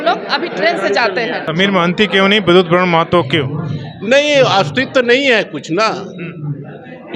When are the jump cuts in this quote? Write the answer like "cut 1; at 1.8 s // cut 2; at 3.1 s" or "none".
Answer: cut 1; at 1.4 s

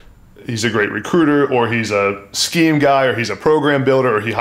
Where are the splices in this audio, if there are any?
none

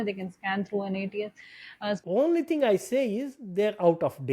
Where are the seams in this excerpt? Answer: cut 1; at 2.0 s

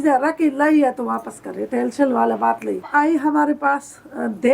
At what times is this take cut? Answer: cut 1; at 2.8 s

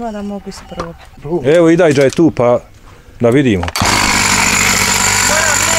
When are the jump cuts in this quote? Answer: cut 1; at 1.1 s

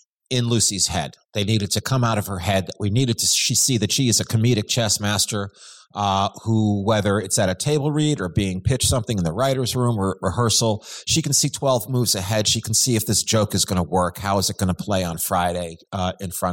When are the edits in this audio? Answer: none

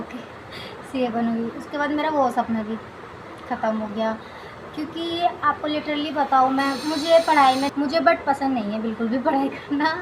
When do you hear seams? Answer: cut 1; at 7.7 s

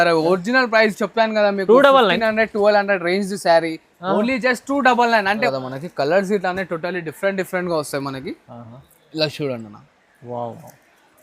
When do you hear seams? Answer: cut 1; at 5.5 s

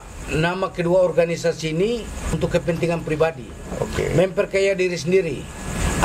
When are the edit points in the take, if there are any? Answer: cut 1; at 2.2 s

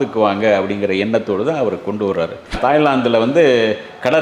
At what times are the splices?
cut 1; at 2.6 s

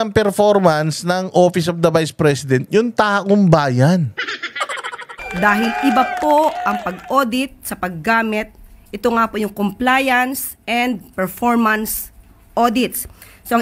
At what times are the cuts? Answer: cut 1; at 5.2 s

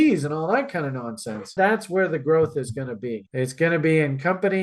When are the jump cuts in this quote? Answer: cut 1; at 1.5 s

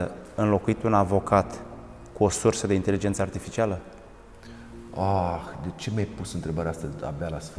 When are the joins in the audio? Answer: none

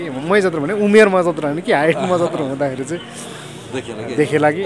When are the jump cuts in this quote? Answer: none

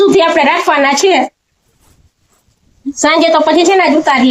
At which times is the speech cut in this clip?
none

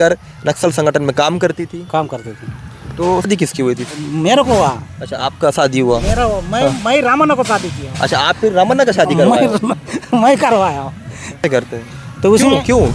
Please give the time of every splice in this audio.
cut 1; at 3.3 s // cut 2; at 11.4 s

